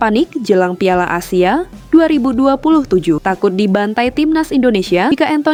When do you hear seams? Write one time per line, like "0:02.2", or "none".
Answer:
none